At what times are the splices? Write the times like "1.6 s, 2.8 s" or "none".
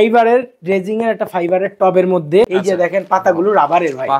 2.5 s